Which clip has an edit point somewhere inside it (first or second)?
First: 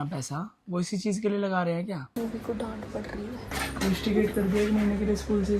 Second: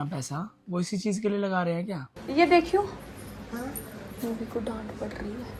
first